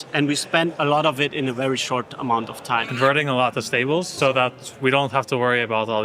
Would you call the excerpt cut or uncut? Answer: cut